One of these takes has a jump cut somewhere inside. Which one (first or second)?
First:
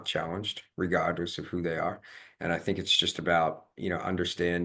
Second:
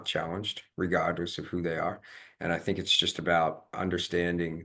second